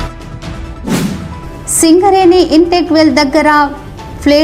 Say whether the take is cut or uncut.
cut